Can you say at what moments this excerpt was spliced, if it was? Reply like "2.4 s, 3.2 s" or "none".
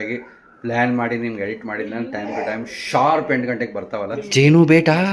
4.2 s